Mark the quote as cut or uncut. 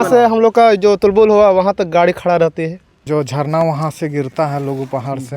cut